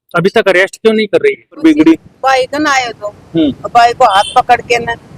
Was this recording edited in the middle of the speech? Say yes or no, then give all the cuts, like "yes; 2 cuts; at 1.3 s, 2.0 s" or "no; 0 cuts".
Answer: yes; 1 cut; at 1.6 s